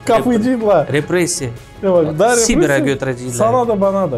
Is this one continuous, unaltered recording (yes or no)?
yes